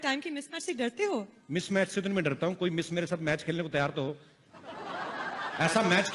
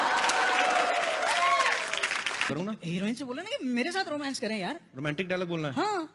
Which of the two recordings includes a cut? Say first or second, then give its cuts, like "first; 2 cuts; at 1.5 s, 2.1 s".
second; 1 cut; at 2.5 s